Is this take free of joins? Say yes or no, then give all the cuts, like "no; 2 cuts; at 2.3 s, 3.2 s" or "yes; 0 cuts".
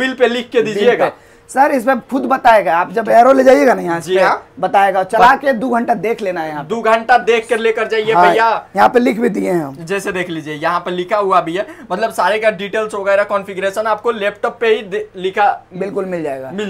yes; 0 cuts